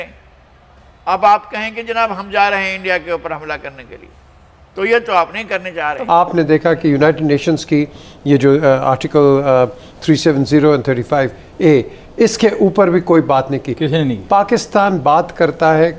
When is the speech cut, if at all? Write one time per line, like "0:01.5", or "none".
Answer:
0:06.0